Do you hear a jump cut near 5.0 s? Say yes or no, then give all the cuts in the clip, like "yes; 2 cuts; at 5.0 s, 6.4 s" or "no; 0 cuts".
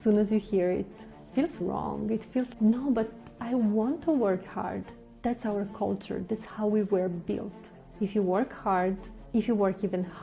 no; 0 cuts